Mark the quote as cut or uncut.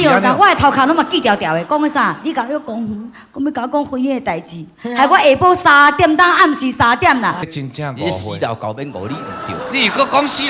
cut